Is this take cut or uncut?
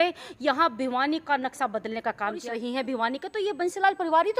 cut